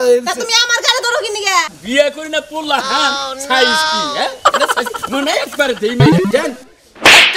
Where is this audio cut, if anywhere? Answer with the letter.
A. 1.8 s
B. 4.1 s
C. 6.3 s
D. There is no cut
A